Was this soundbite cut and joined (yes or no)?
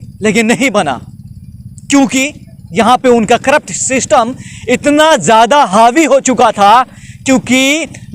no